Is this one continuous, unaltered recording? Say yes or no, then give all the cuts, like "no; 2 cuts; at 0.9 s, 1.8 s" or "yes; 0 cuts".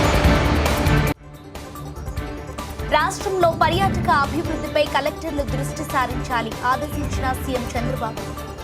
no; 1 cut; at 2.3 s